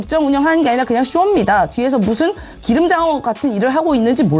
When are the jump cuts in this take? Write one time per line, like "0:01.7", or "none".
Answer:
none